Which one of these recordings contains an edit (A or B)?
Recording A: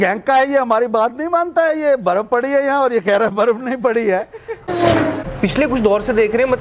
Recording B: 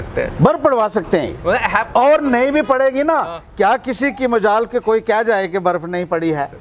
A